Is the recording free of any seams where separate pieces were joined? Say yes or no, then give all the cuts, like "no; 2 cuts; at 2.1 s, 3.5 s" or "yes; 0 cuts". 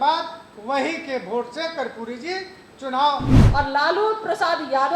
no; 1 cut; at 3.4 s